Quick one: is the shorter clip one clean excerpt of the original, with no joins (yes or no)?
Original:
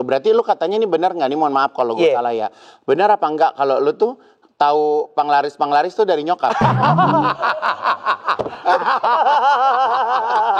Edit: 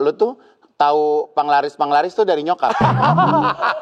yes